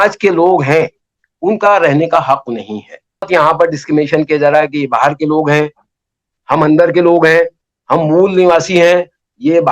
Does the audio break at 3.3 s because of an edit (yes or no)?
yes